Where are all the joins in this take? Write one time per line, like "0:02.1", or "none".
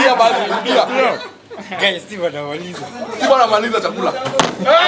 none